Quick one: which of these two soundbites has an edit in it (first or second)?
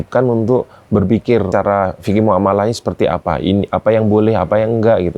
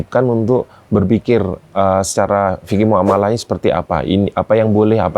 first